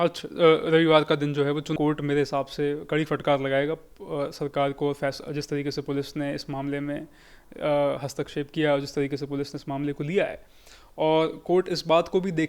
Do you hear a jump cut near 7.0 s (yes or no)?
no